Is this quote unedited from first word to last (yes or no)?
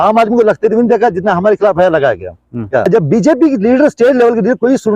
no